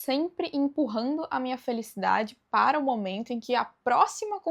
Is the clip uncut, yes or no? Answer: yes